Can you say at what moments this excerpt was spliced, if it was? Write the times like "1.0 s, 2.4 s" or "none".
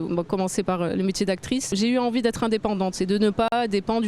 1.7 s